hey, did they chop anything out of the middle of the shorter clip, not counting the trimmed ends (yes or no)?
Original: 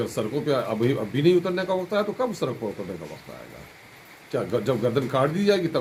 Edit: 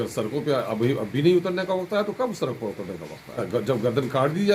yes